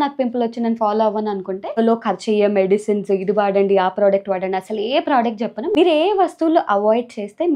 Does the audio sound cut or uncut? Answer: cut